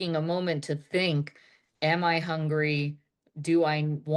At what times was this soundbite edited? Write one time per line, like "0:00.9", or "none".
none